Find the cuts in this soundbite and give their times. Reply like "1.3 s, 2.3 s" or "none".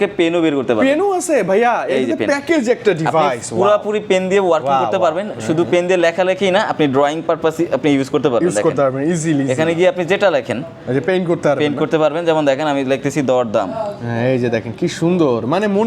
none